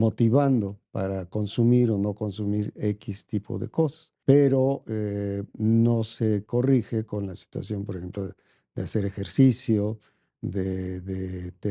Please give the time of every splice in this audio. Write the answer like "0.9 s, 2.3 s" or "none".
4.1 s